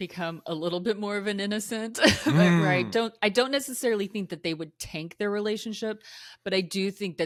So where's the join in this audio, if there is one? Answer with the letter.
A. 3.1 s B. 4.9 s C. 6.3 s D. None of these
D